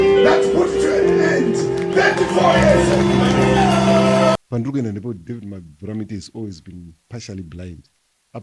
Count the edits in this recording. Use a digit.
1